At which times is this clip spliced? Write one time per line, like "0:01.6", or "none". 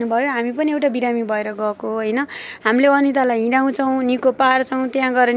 none